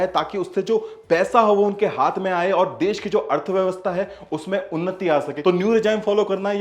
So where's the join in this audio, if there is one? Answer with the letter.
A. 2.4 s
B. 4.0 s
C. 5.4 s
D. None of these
C